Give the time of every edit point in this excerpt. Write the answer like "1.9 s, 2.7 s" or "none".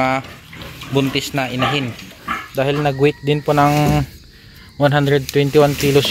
2.1 s